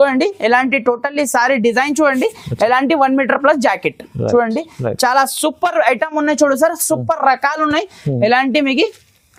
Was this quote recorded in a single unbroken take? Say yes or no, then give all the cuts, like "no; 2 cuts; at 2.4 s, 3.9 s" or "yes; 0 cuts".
yes; 0 cuts